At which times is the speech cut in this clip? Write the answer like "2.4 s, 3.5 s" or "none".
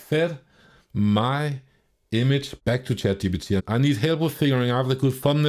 2.5 s, 3.6 s